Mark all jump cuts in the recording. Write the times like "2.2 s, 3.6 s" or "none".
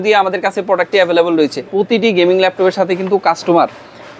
1.6 s